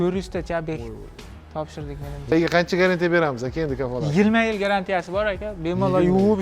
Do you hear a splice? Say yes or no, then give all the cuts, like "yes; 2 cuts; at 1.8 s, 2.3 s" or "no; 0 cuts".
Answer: yes; 1 cut; at 2.3 s